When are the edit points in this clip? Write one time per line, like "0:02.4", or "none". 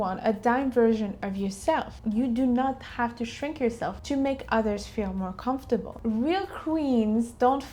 0:01.9
0:05.9